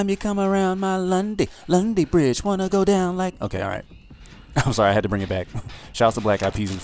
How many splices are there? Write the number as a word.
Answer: zero